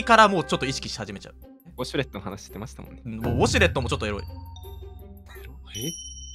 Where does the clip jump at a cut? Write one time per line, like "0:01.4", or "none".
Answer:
0:01.7